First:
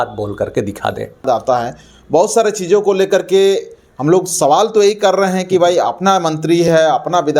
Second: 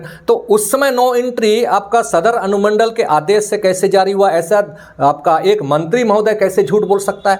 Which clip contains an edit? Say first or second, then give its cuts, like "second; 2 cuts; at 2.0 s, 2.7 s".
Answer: first; 1 cut; at 1.3 s